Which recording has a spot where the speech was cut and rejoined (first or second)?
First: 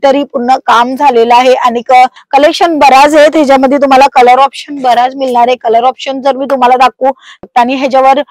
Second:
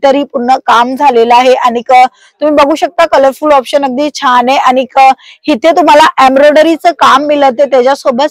first